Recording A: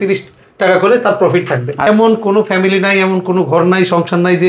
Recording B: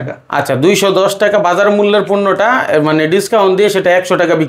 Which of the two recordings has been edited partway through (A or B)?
A